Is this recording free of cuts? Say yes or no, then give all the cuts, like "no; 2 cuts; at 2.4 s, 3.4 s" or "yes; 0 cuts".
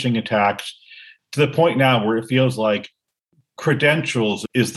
yes; 0 cuts